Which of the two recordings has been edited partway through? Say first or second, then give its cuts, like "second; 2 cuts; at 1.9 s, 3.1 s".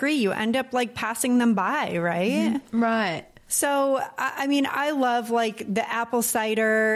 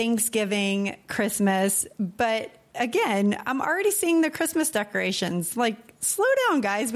first; 1 cut; at 3.2 s